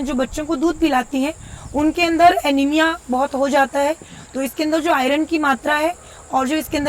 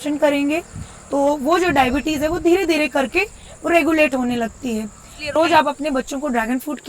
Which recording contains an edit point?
second; 1 cut; at 5.3 s

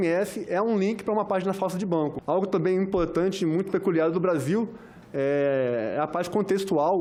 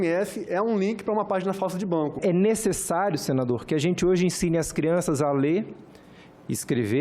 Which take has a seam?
second; 1 cut; at 2.2 s

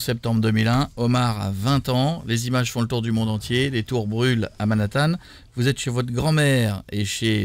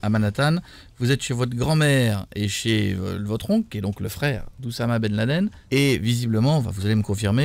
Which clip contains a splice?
second; 1 cut; at 5.6 s

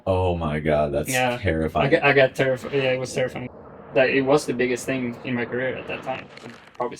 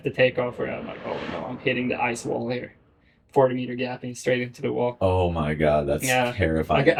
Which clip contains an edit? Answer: first; 1 cut; at 3.9 s

